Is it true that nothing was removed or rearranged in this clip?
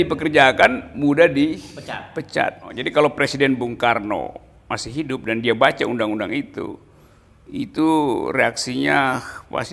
no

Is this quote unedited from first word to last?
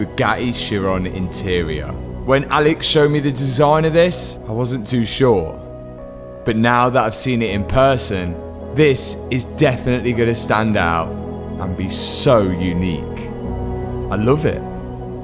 yes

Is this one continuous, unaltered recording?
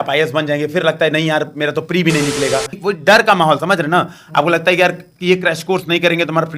no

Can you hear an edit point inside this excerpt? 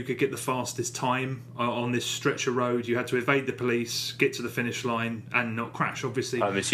yes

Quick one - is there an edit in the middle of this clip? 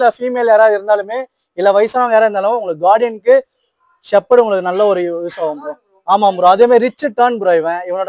no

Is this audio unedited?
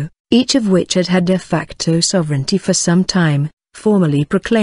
yes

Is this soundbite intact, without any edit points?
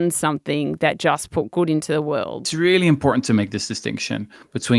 no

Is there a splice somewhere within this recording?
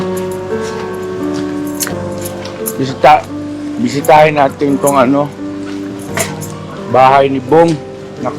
yes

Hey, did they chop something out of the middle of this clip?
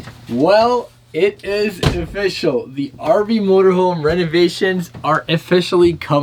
no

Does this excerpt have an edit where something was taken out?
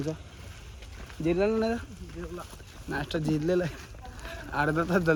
no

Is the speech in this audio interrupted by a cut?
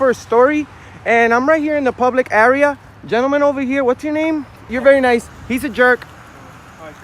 yes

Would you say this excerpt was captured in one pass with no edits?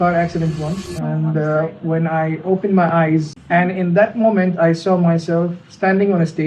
no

